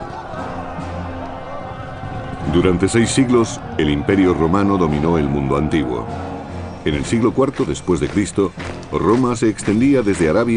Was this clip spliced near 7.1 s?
no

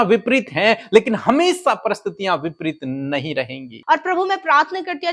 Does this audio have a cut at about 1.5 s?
no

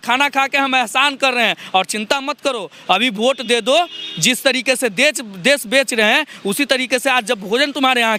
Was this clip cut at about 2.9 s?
no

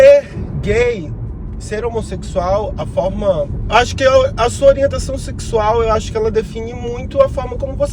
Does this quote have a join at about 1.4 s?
no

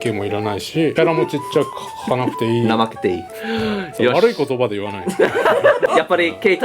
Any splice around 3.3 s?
yes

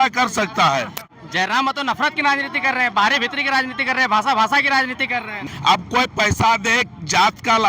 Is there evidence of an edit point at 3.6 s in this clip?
no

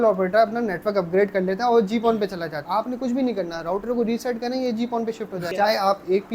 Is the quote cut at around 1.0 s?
no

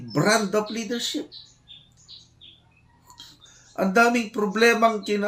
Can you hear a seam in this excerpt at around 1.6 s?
no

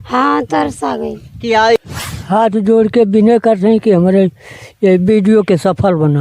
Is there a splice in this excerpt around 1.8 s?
yes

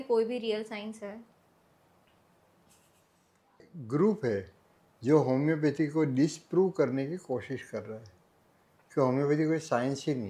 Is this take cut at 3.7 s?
yes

